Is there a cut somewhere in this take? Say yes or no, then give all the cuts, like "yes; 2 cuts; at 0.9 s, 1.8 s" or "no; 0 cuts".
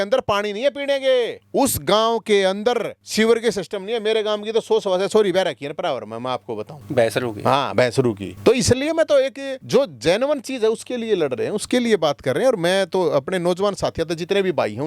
no; 0 cuts